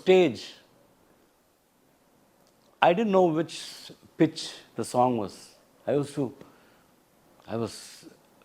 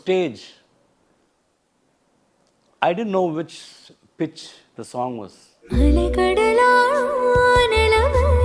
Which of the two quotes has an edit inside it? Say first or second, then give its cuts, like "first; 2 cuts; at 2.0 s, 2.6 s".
second; 1 cut; at 5.7 s